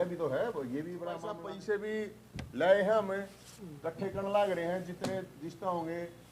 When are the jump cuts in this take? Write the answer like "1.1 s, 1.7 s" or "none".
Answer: 1.4 s